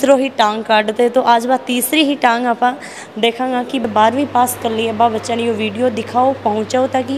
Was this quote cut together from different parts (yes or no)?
yes